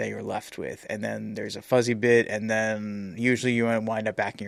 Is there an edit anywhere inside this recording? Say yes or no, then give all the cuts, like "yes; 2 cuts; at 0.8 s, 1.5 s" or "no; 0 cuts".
no; 0 cuts